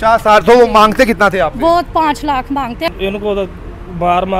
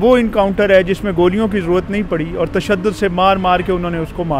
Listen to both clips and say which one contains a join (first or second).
first